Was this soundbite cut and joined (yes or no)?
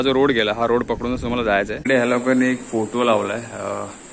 yes